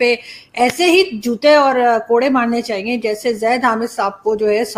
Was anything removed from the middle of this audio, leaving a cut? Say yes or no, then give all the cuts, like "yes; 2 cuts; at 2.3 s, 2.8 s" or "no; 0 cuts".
no; 0 cuts